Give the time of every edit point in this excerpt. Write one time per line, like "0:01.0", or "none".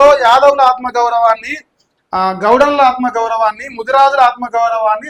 none